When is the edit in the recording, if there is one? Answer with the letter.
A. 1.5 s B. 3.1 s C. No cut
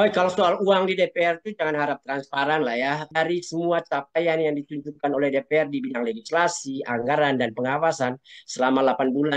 B